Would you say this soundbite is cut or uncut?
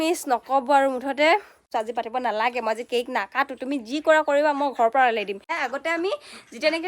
cut